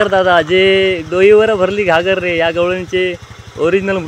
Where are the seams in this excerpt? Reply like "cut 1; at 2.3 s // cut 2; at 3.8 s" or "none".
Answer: none